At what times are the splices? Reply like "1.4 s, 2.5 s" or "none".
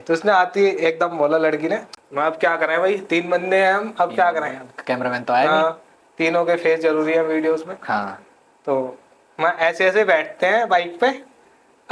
1.9 s